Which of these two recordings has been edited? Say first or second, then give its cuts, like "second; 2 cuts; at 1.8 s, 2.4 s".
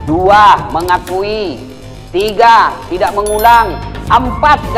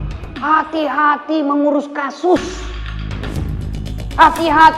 second; 2 cuts; at 2.8 s, 3.9 s